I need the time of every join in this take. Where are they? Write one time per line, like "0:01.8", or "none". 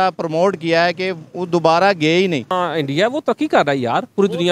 0:02.5